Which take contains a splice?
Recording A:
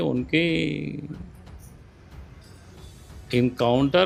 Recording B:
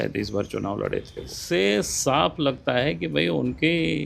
B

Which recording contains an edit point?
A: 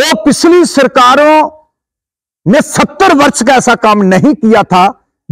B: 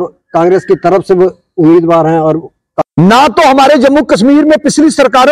B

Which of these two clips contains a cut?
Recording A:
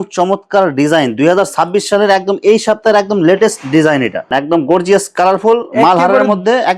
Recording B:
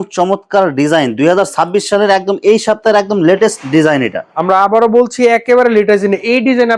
A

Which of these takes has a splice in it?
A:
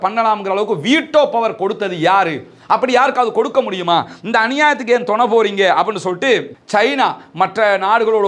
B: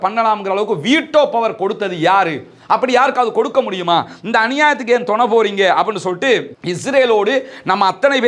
A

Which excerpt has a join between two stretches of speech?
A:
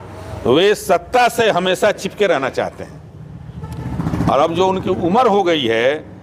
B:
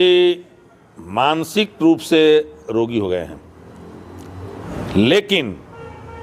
B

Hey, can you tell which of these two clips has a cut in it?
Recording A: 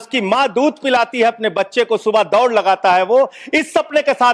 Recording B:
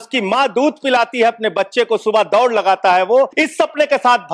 B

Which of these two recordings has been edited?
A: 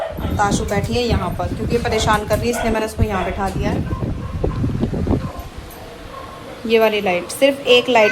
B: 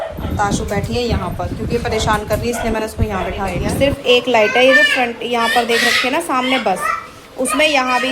B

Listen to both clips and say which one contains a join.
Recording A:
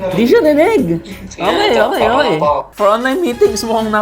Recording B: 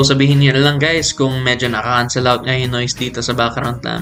A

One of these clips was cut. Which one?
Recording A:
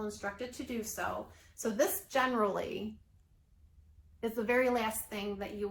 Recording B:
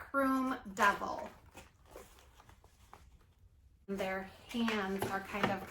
B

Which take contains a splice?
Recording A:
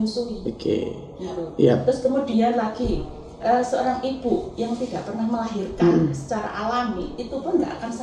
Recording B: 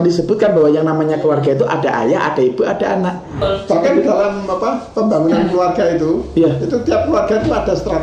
B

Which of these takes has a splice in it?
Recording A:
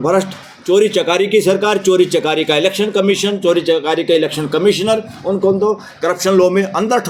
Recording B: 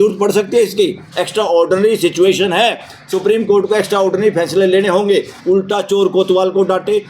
B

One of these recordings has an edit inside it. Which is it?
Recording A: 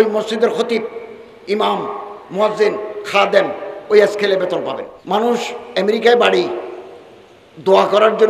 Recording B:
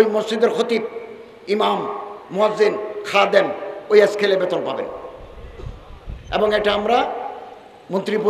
A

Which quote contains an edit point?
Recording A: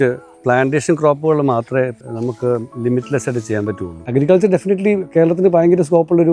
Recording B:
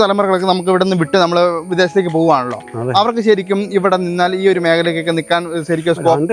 A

